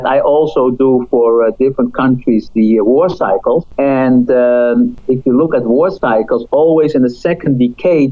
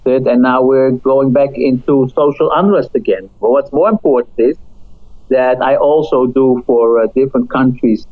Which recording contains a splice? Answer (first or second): first